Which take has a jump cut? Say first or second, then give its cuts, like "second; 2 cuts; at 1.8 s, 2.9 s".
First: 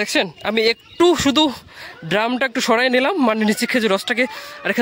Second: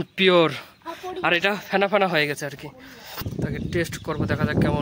second; 1 cut; at 3.3 s